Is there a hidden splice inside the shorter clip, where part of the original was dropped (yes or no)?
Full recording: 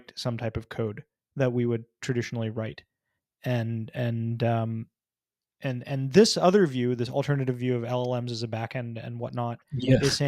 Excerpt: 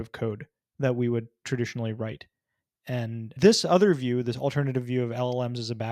yes